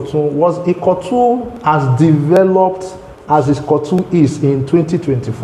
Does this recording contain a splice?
no; 0 cuts

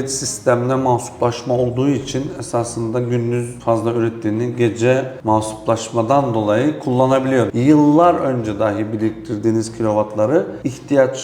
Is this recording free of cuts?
no; 1 cut; at 7.5 s

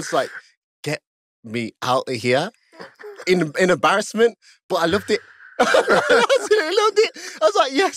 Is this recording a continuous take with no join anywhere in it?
yes; 0 cuts

